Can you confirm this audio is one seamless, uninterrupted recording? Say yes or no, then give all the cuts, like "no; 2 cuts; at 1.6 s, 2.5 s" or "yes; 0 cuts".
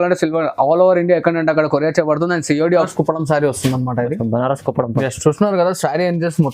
no; 1 cut; at 2.9 s